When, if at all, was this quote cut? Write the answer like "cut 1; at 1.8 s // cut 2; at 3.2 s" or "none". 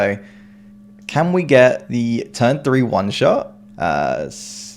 none